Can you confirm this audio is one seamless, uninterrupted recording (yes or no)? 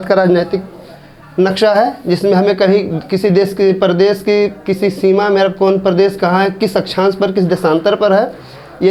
yes